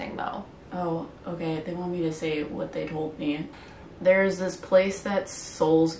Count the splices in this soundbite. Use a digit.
1